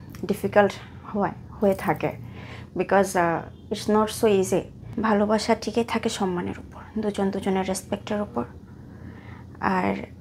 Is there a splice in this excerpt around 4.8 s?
yes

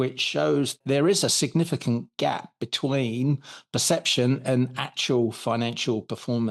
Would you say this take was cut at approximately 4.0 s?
no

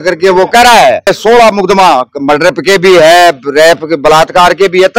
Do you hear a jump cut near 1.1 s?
yes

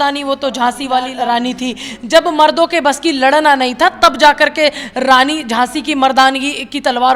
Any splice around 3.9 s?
no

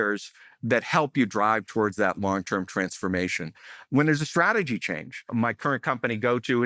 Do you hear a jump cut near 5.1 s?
yes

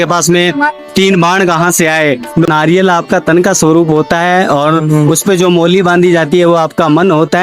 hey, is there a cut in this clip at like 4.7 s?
no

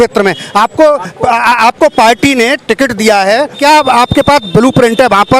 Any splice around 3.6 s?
yes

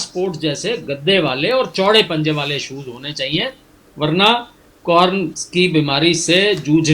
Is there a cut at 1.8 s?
no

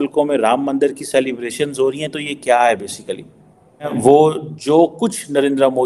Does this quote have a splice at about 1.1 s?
no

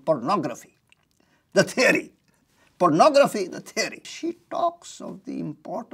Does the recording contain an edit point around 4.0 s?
yes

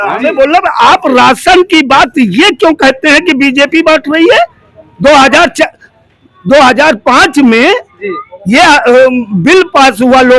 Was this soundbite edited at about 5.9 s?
no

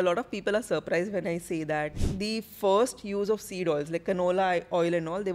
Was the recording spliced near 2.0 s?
yes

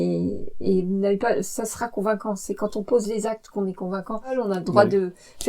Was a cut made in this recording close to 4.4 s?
yes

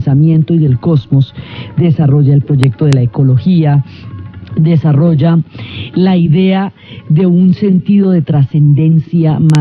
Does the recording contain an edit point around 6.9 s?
no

